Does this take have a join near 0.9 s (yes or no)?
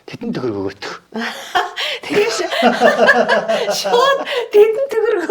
yes